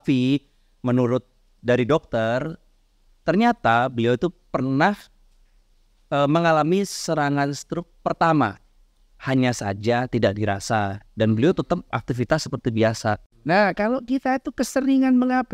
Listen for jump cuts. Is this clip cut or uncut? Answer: cut